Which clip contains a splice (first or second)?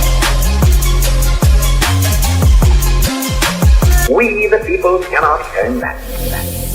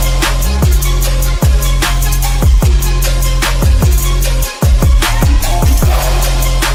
first